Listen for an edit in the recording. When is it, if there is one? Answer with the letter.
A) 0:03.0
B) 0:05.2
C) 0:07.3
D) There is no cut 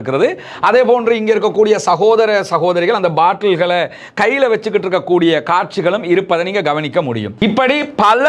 C